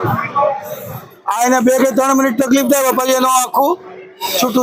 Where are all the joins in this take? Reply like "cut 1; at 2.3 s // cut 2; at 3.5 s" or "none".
none